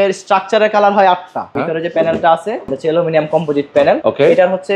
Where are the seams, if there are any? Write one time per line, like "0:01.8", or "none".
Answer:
0:01.6
0:02.7
0:04.0